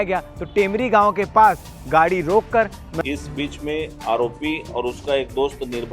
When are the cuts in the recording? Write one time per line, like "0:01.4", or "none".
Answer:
0:02.8